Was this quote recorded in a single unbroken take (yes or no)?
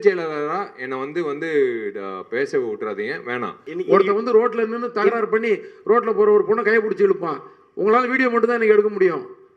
no